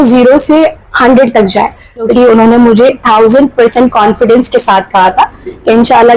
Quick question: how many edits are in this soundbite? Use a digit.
1